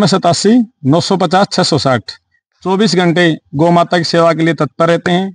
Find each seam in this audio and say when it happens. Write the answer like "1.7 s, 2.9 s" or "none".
none